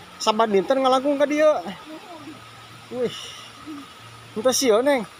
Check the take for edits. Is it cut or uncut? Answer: uncut